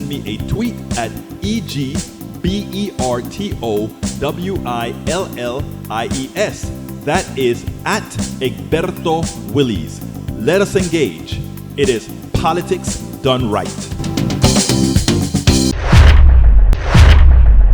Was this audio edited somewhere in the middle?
yes; 1 cut; at 16.7 s

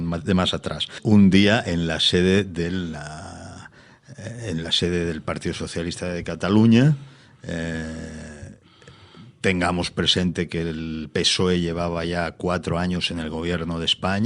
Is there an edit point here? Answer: yes; 1 cut; at 0.9 s

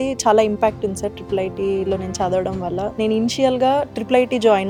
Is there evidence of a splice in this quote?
no; 0 cuts

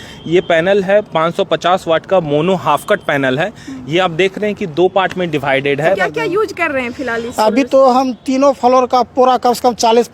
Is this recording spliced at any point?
yes; 1 cut; at 6.0 s

